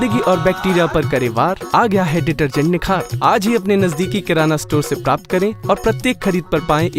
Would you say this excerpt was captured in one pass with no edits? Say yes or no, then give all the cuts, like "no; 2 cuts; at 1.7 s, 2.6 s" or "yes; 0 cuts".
yes; 0 cuts